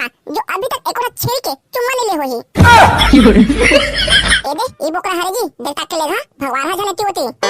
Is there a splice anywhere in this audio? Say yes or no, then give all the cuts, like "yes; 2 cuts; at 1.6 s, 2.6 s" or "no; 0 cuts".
yes; 1 cut; at 4.4 s